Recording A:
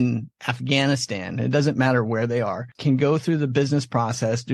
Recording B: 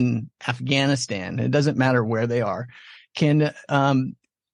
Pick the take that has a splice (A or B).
A